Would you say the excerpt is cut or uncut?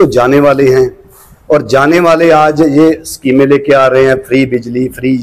uncut